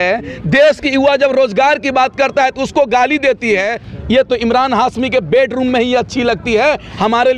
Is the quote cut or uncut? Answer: cut